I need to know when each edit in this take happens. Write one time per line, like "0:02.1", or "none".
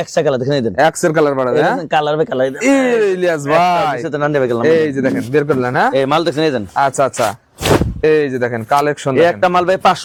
none

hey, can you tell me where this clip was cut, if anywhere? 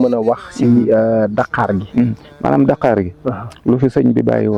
none

